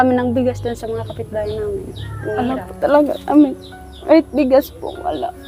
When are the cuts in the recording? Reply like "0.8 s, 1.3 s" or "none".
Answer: 2.4 s